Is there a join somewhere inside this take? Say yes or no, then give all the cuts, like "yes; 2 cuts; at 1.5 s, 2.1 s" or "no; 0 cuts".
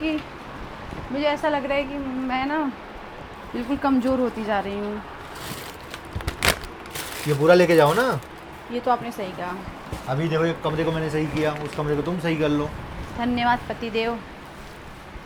no; 0 cuts